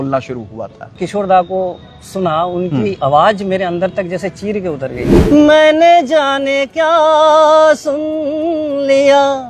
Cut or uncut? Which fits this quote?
cut